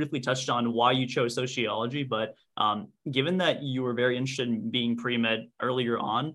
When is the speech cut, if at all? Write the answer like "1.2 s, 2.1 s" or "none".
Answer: none